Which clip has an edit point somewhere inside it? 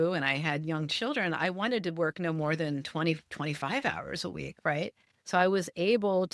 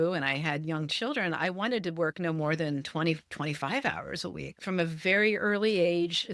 second; 1 cut; at 4.6 s

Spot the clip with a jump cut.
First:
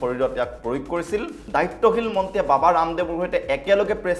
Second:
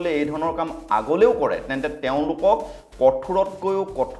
first; 1 cut; at 1.4 s

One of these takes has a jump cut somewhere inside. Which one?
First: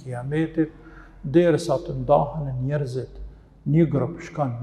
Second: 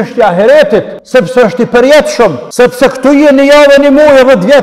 second; 2 cuts; at 1.0 s, 2.4 s

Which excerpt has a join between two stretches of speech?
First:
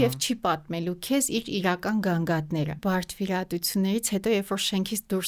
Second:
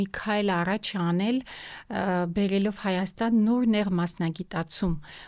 first; 1 cut; at 2.8 s

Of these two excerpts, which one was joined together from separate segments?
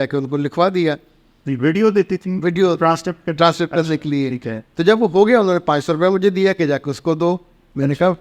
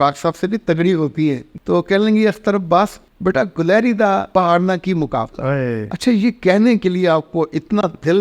second; 4 cuts; at 1.5 s, 3.0 s, 4.3 s, 5.9 s

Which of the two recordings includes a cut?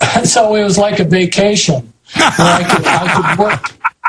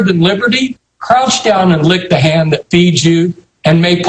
second; 1 cut; at 2.4 s

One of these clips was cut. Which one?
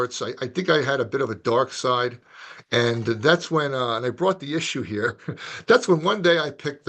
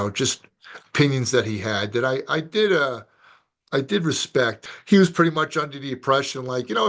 second; 1 cut; at 4.6 s

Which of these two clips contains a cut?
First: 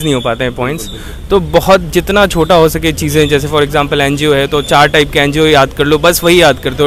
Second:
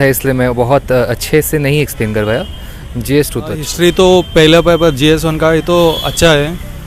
second; 1 cut; at 3.7 s

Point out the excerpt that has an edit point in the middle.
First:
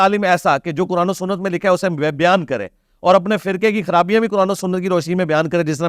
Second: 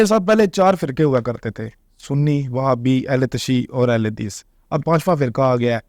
second; 1 cut; at 4.8 s

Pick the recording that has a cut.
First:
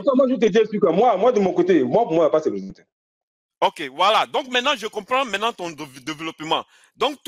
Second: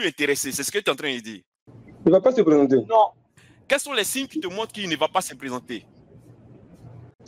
second; 1 cut; at 1.6 s

